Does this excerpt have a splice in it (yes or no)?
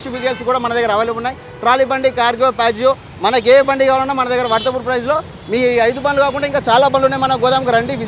no